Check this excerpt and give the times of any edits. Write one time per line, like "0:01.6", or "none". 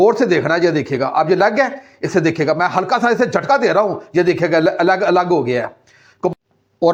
none